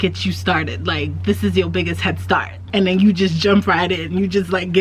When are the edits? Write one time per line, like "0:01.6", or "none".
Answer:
0:02.6